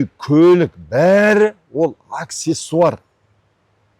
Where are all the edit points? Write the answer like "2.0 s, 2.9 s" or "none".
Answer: none